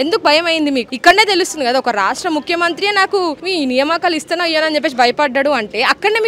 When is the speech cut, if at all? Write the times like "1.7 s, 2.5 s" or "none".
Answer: 0.9 s